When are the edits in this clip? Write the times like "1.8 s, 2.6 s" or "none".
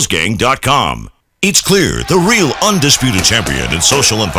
1.2 s